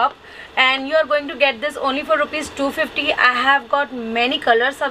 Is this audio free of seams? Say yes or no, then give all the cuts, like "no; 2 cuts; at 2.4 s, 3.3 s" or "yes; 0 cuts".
yes; 0 cuts